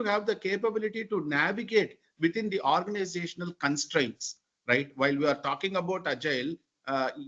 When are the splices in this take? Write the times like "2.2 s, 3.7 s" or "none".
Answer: none